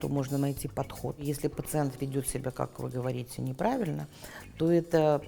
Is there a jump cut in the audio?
yes; 1 cut; at 1.2 s

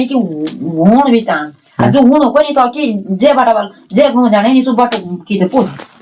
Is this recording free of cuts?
yes; 0 cuts

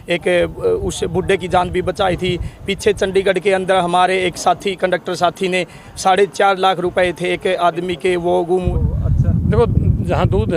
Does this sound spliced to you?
yes; 1 cut; at 8.7 s

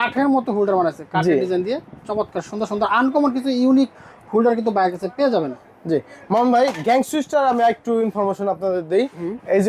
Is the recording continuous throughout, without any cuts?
yes; 0 cuts

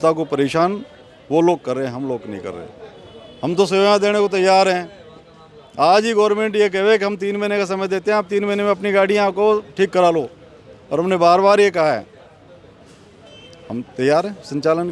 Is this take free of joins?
yes; 0 cuts

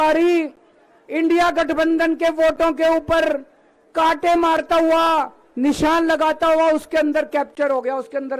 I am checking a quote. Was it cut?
no; 0 cuts

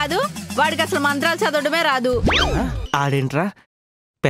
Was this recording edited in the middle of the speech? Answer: yes; 1 cut; at 2.8 s

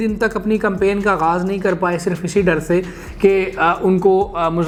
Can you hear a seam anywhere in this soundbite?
no; 0 cuts

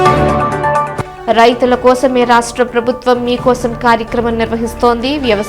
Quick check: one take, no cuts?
no; 1 cut; at 1.0 s

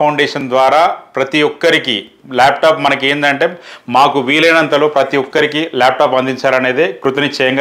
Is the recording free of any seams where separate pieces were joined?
yes; 0 cuts

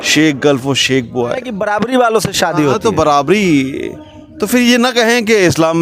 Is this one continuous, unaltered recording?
no; 1 cut; at 1.5 s

